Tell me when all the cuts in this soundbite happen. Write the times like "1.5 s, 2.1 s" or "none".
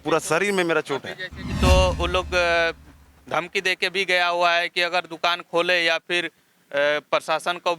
1.6 s

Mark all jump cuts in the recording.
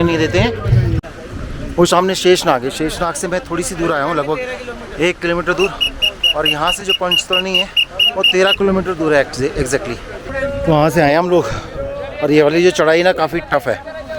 1.0 s, 10.3 s

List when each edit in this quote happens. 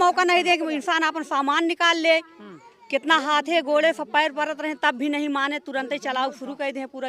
none

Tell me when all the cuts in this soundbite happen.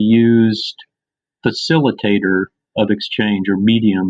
none

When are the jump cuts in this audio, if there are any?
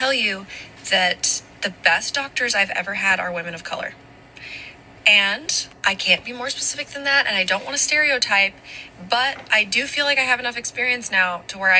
none

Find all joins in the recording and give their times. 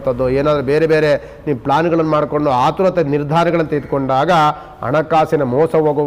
none

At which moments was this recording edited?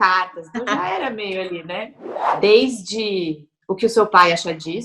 1.9 s

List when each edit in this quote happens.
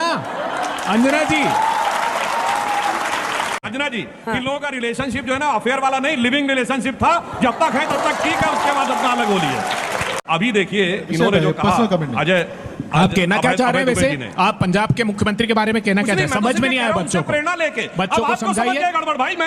3.6 s, 10.1 s

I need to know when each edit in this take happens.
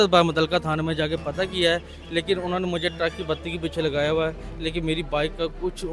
none

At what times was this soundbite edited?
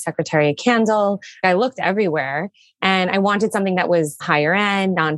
1.4 s, 4.2 s

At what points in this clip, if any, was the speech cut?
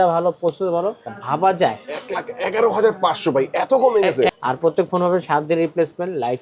1.1 s, 4.3 s

